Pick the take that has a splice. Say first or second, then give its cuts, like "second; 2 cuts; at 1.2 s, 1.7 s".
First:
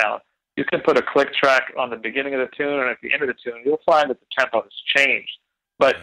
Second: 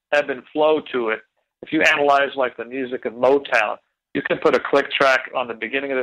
second; 1 cut; at 1.3 s